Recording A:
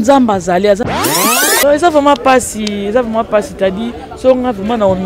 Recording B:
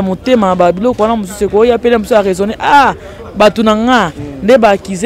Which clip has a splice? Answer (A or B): A